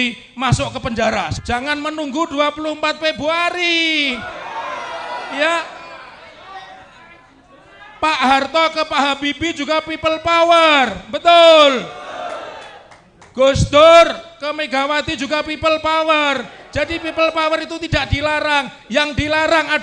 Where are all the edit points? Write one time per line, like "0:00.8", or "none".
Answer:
0:01.4